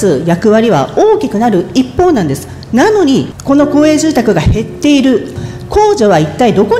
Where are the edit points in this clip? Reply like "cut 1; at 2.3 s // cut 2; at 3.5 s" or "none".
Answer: cut 1; at 3.3 s // cut 2; at 5.3 s